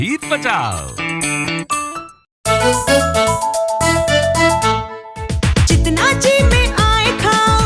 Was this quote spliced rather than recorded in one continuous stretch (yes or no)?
yes